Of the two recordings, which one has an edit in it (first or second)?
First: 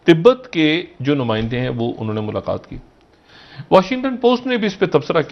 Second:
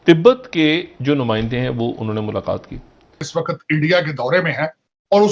second